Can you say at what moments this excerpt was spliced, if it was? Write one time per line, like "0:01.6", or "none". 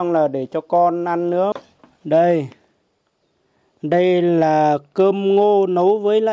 0:01.5

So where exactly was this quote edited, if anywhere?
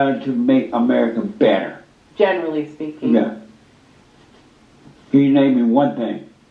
none

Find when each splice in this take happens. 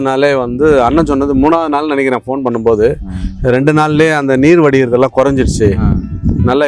none

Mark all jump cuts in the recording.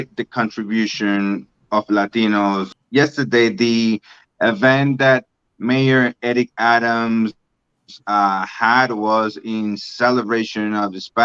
0:02.7

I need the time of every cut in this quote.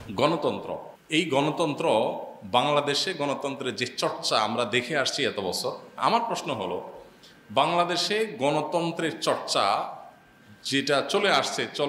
0:00.9
0:05.9

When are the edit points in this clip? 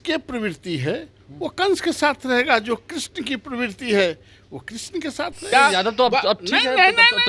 0:05.4

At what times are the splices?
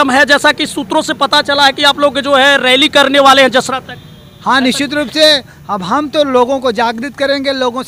none

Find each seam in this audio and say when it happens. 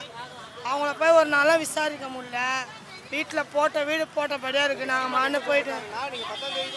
none

